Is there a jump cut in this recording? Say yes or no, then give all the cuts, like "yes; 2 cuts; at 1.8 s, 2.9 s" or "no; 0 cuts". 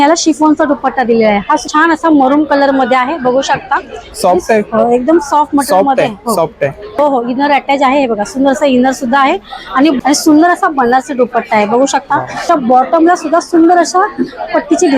yes; 3 cuts; at 1.6 s, 7.0 s, 12.5 s